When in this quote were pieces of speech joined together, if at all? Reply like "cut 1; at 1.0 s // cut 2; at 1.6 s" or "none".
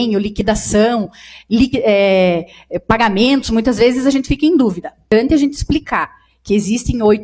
cut 1; at 5.0 s